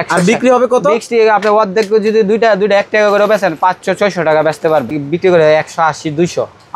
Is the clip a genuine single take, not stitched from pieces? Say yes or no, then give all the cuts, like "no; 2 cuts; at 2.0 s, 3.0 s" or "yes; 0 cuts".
no; 1 cut; at 4.9 s